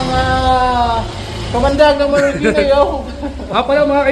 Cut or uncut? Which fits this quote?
uncut